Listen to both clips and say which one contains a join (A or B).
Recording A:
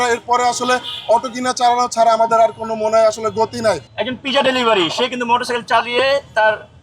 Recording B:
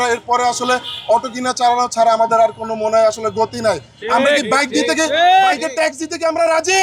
A